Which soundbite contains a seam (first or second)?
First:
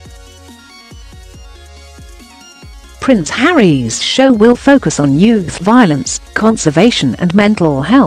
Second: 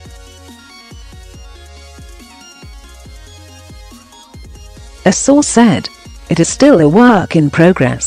first